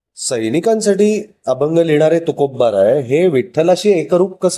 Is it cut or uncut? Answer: uncut